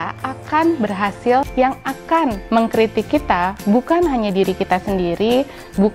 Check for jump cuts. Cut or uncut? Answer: cut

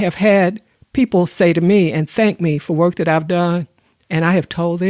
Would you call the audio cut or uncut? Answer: uncut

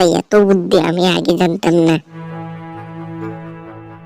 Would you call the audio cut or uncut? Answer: cut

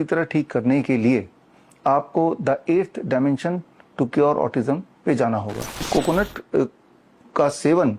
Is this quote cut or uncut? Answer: cut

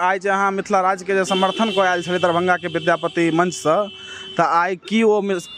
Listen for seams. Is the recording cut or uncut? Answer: uncut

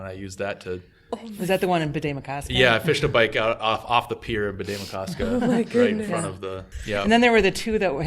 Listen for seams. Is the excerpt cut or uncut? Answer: cut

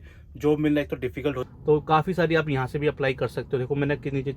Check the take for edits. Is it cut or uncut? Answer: cut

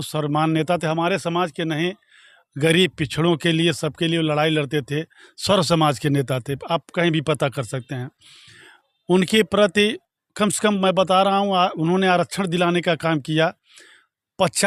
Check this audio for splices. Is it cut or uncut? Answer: uncut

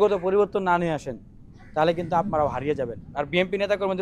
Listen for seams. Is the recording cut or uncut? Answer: uncut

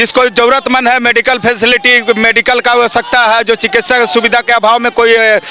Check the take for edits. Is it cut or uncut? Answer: uncut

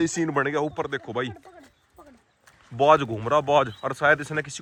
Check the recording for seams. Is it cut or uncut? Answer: uncut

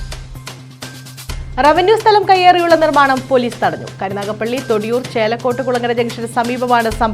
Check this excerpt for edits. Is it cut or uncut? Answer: cut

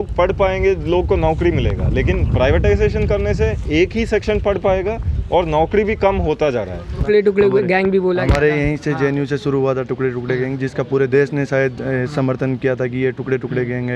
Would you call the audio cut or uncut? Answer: cut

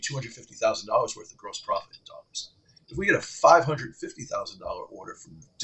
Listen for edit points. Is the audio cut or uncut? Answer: uncut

